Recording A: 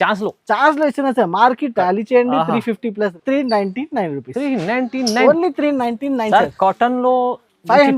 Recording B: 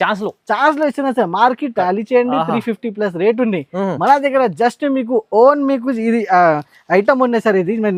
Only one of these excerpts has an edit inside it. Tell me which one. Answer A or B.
A